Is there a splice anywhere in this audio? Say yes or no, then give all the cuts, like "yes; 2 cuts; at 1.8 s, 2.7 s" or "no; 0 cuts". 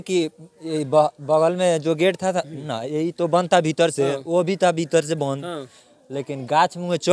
no; 0 cuts